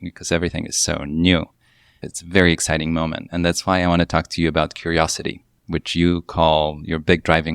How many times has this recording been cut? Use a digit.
1